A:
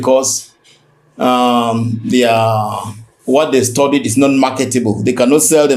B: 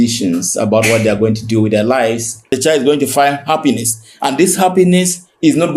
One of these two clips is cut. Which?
B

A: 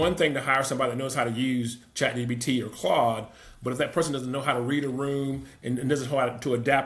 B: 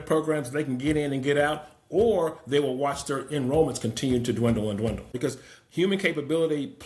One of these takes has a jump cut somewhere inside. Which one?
B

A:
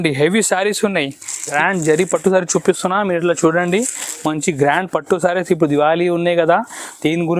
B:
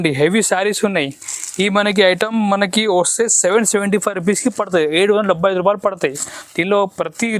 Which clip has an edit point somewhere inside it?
A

